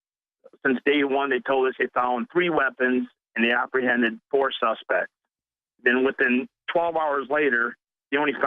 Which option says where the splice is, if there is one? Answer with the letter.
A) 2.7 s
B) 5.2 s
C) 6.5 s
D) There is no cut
C